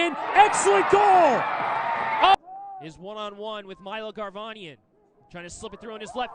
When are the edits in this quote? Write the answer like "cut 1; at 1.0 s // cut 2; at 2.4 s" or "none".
cut 1; at 2.5 s